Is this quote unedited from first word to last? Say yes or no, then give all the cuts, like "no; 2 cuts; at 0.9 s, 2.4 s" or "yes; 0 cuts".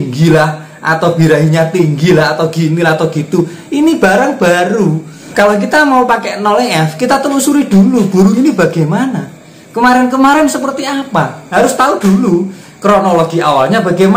no; 2 cuts; at 5.2 s, 11.4 s